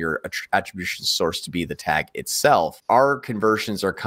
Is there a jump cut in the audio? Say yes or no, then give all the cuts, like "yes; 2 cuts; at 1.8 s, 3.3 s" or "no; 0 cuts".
yes; 1 cut; at 2.8 s